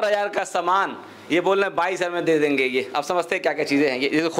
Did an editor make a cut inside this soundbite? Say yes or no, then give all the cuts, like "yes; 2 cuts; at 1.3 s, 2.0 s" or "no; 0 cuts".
no; 0 cuts